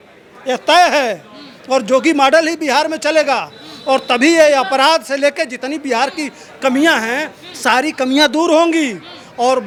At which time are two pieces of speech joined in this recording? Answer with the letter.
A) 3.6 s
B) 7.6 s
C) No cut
C